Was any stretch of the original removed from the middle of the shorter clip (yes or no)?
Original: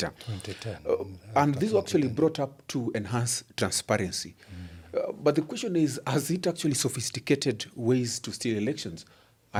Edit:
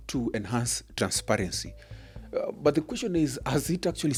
no